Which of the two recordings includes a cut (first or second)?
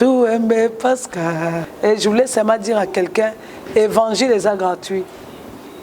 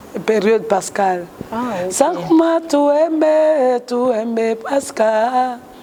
first